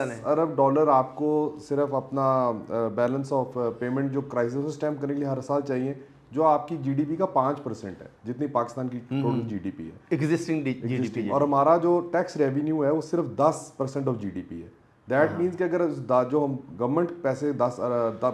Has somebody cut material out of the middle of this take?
no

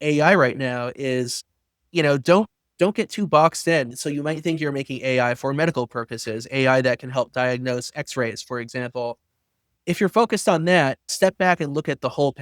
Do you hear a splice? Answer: yes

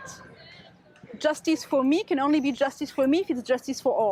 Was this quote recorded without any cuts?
yes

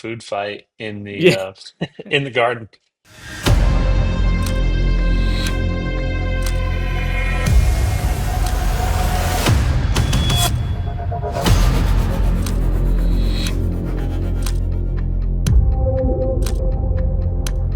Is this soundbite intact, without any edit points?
yes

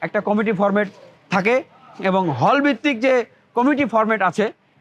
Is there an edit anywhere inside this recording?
no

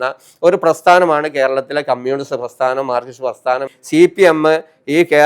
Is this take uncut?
no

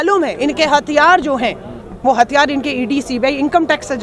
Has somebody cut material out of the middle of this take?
no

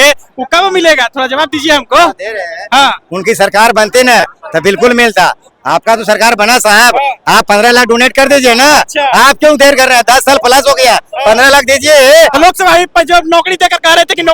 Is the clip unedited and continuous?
no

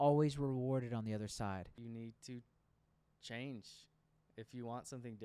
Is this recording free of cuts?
no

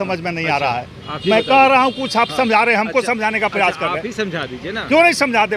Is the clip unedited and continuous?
yes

